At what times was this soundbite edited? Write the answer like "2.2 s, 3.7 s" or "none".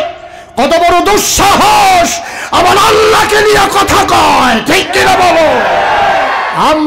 none

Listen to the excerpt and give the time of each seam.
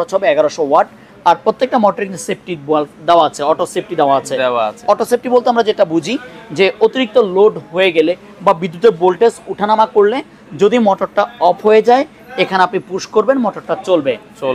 none

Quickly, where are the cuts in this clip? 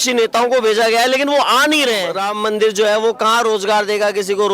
2.2 s

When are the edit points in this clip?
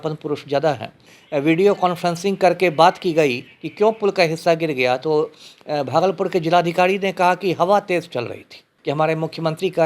1.1 s, 8.6 s

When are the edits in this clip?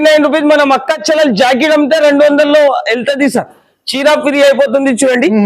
none

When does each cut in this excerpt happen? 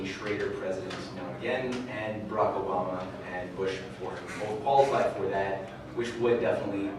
1.2 s

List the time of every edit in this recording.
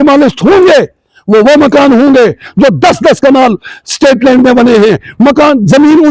none

